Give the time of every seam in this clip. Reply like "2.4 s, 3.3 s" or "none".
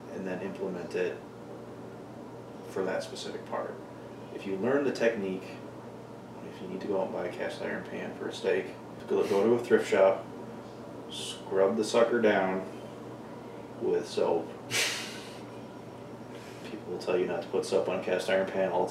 9.0 s